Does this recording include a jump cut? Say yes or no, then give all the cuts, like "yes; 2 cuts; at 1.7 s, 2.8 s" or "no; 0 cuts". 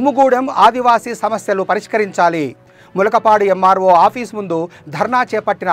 no; 0 cuts